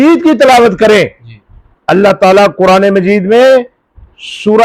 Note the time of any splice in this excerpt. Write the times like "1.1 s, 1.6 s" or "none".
none

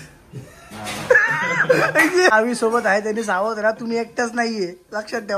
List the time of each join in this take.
2.3 s

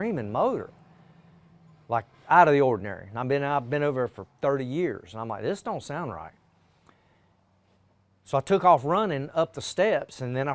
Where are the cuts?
none

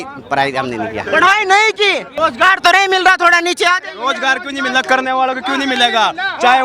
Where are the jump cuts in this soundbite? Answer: 2.1 s

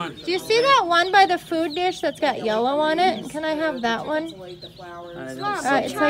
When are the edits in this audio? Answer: none

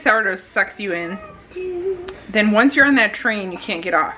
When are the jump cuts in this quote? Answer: none

